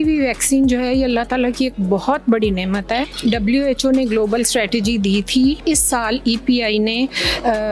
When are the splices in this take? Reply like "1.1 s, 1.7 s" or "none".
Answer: 3.1 s, 5.6 s